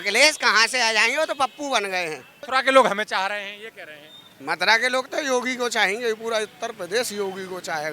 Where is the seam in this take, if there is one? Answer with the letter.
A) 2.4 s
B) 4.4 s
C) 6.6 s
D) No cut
A